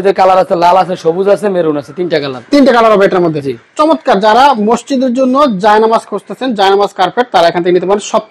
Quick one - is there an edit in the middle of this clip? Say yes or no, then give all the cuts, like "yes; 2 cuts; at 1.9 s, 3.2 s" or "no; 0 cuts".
no; 0 cuts